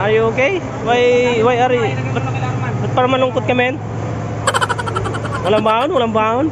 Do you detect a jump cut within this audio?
no; 0 cuts

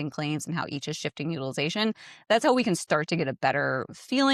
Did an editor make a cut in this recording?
no; 0 cuts

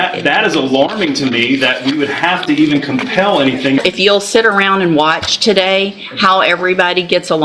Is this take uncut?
no; 1 cut; at 3.8 s

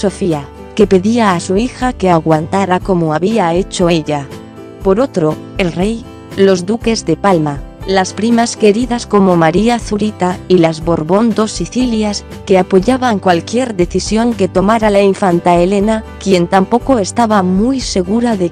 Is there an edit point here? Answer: no; 0 cuts

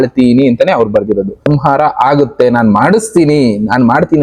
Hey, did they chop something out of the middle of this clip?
yes; 1 cut; at 1.5 s

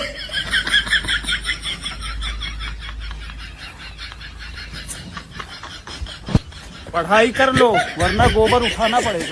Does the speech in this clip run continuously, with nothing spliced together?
yes; 0 cuts

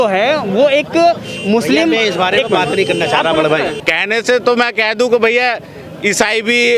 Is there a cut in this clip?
yes; 1 cut; at 3.8 s

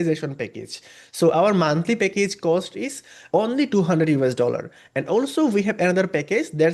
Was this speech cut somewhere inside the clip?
yes; 1 cut; at 3.1 s

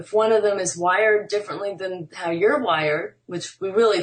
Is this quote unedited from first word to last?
yes; 0 cuts

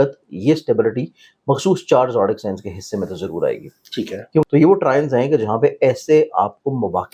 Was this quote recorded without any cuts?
no; 1 cut; at 4.4 s

